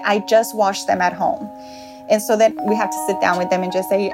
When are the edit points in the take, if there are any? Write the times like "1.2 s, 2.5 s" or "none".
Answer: 2.5 s